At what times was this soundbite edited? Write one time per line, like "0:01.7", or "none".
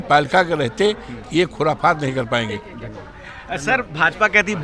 none